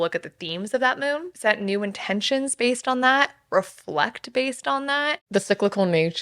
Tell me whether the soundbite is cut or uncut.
cut